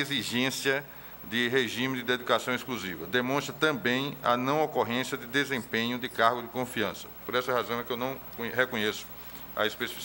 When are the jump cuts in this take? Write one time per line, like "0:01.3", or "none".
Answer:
0:07.2

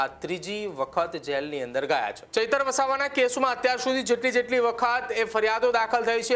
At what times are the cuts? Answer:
0:02.2

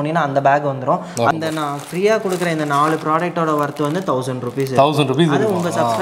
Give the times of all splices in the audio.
0:01.3

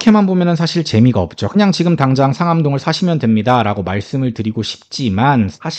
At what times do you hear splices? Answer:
none

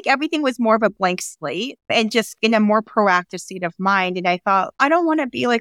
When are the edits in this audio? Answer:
0:02.4

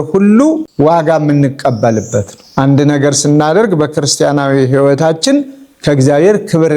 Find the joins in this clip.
none

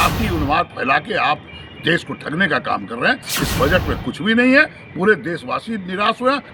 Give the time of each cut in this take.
none

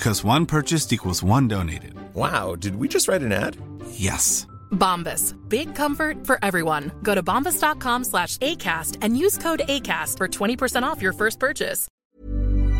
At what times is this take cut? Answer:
0:11.9

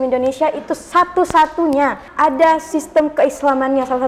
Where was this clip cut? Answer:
0:02.1

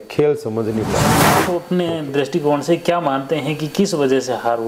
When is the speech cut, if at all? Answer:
0:01.2

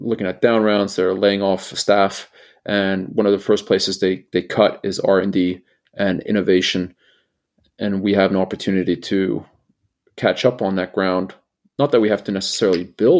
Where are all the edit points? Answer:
none

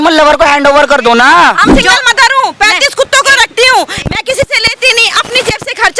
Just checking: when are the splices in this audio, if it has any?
0:01.7

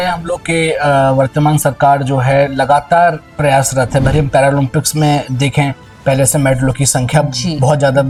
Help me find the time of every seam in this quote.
none

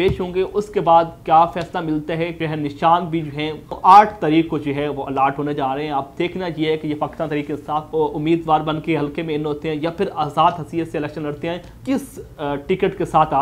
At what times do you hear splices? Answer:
0:02.4
0:03.8
0:07.9
0:11.7

